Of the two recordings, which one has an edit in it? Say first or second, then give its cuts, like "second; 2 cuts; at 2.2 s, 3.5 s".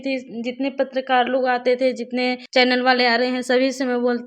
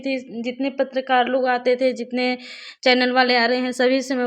first; 1 cut; at 2.4 s